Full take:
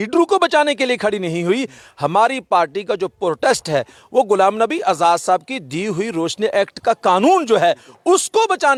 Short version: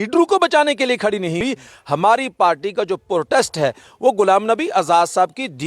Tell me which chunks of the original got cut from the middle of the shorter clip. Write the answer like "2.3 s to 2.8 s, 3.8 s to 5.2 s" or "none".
1.4 s to 1.5 s